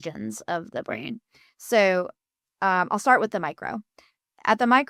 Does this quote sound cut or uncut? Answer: uncut